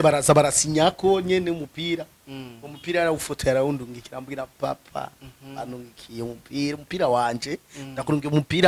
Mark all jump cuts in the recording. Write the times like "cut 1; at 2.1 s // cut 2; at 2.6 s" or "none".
none